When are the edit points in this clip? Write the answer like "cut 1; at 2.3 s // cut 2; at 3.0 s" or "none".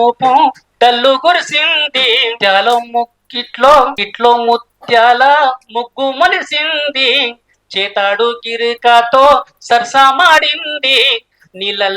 cut 1; at 2.4 s // cut 2; at 4.0 s